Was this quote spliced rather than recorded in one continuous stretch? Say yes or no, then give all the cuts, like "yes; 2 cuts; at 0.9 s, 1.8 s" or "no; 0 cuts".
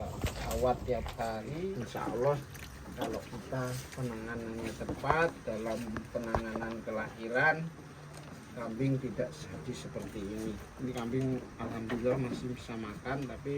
yes; 1 cut; at 1.5 s